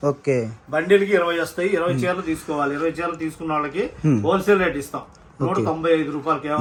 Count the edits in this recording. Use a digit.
0